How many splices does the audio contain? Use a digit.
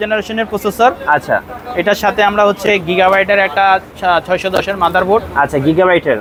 0